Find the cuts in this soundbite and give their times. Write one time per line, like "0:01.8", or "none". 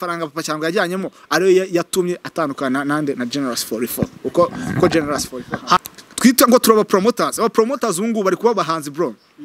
0:05.8